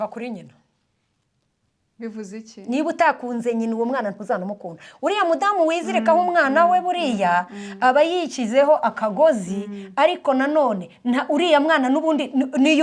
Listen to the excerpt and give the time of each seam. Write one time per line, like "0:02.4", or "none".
none